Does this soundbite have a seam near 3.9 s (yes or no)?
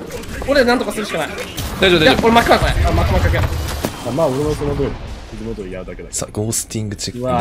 yes